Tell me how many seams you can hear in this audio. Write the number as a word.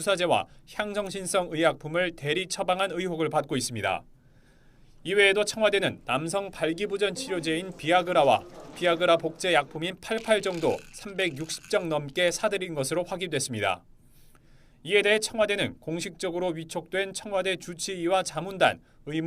one